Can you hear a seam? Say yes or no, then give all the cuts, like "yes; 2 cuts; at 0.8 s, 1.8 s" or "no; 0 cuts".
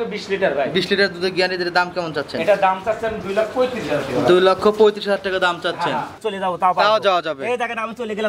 yes; 1 cut; at 6.3 s